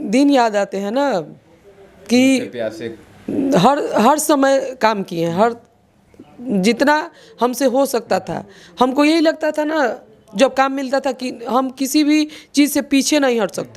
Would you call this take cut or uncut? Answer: uncut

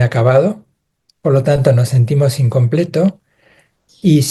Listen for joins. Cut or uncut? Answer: uncut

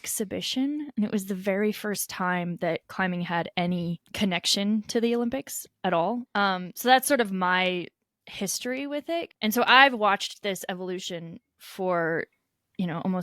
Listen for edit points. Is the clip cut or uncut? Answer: cut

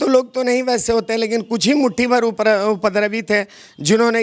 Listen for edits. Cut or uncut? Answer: uncut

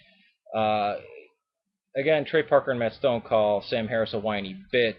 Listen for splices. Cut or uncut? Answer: uncut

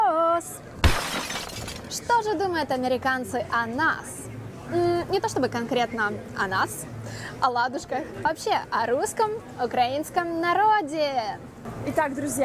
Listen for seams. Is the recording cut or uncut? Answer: cut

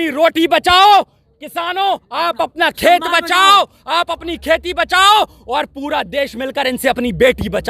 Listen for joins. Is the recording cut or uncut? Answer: uncut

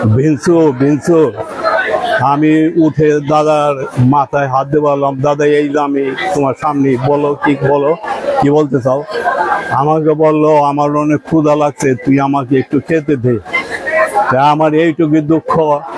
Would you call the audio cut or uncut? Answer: uncut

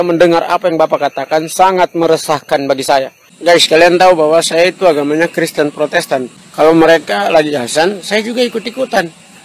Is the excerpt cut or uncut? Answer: cut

